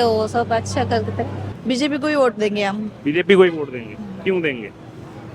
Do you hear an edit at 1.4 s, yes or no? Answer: yes